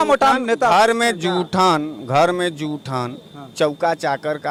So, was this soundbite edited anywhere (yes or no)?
no